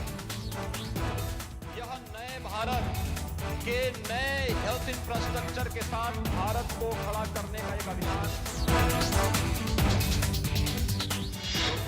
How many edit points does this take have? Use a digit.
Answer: 1